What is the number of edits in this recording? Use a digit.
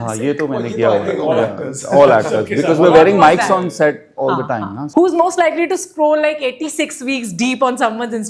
1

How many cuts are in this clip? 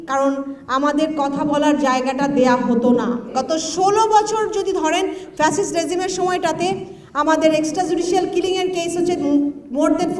1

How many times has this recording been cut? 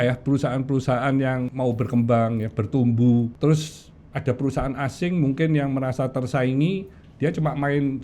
2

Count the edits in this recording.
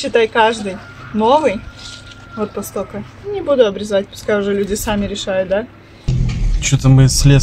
1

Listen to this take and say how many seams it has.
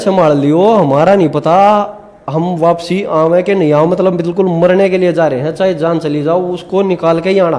0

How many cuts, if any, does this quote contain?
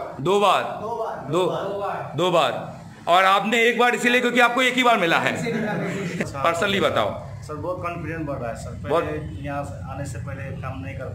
1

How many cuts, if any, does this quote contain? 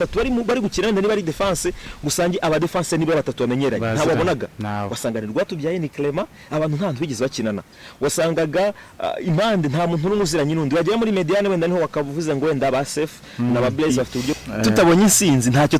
1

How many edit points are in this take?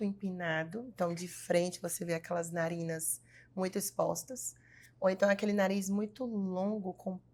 0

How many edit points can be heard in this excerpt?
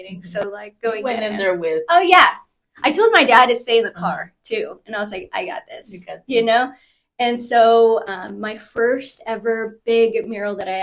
1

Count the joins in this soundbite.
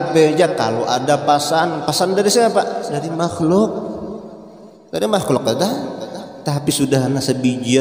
0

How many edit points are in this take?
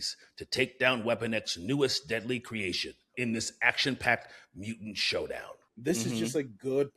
2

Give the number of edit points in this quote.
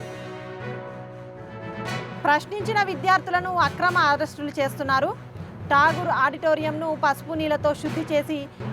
1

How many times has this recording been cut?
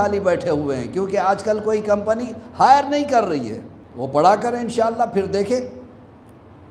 0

